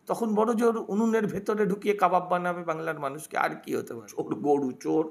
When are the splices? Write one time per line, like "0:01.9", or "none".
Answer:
0:04.1